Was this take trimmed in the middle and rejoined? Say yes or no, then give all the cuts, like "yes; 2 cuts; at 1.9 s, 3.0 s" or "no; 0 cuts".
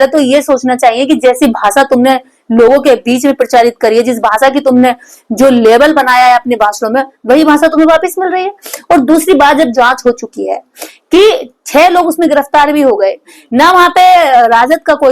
no; 0 cuts